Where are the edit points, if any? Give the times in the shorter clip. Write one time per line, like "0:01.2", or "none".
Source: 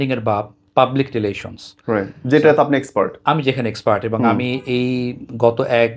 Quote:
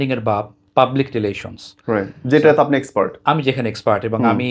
none